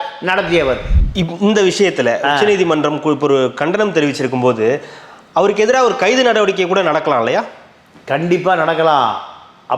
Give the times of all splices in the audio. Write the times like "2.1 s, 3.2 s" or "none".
0.9 s